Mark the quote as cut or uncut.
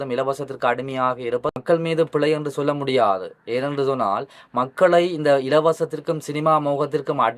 cut